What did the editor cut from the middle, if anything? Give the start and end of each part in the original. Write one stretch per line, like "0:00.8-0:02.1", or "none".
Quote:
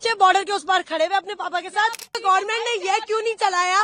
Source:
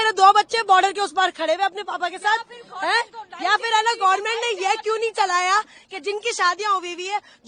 0:02.7-0:04.0